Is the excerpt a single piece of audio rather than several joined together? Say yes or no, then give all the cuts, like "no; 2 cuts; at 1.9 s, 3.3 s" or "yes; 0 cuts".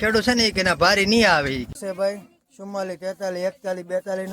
no; 1 cut; at 1.8 s